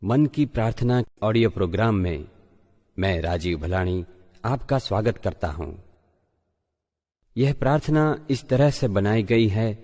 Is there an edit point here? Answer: yes; 1 cut; at 1.1 s

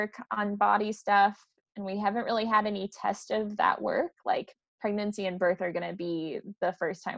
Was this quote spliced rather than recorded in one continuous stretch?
no; 0 cuts

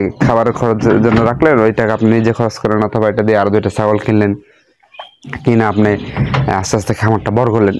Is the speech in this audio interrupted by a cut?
no; 0 cuts

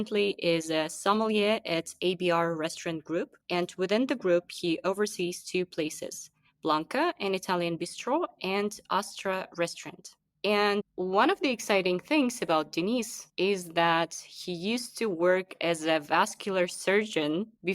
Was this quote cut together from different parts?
no; 0 cuts

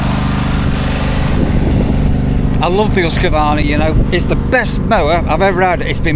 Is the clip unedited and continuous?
yes; 0 cuts

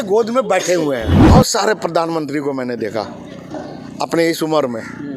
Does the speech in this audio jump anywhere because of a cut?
yes; 1 cut; at 1.2 s

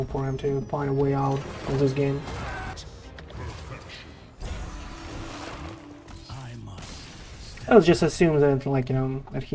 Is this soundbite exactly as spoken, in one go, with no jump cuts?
no; 1 cut; at 2.4 s

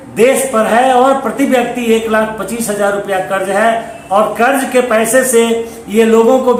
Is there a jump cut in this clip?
no; 0 cuts

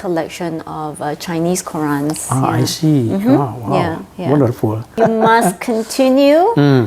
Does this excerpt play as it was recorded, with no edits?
no; 1 cut; at 4.9 s

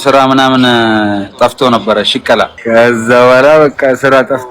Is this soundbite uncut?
no; 1 cut; at 2.6 s

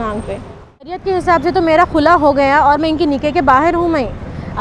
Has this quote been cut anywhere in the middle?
yes; 1 cut; at 1.0 s

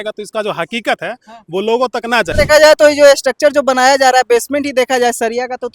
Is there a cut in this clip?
yes; 1 cut; at 2.3 s

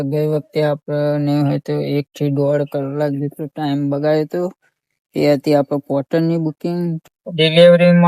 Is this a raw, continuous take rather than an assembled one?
no; 1 cut; at 7.1 s

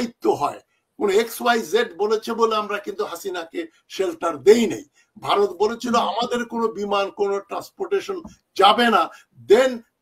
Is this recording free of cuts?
yes; 0 cuts

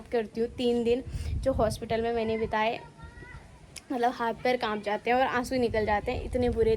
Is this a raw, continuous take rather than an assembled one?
yes; 0 cuts

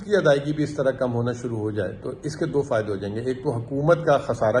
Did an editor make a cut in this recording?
no; 0 cuts

